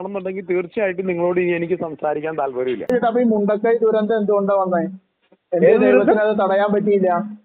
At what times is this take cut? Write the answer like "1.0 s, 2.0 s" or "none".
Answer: 2.9 s